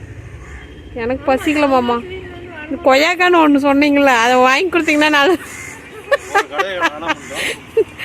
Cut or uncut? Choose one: uncut